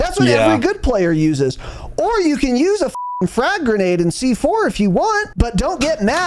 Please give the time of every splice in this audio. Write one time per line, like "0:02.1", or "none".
0:05.3